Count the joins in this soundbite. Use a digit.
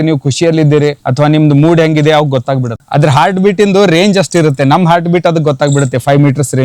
2